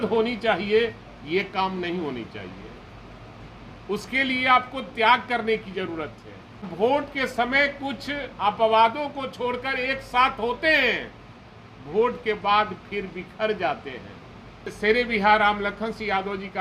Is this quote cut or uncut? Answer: cut